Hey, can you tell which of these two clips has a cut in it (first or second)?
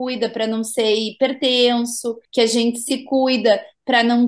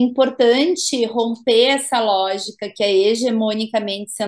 first